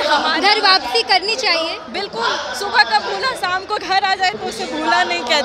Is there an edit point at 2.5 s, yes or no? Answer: no